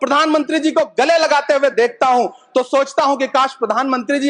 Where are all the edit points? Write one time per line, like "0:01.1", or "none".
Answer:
none